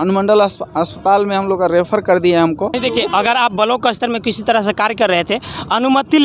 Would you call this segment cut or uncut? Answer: cut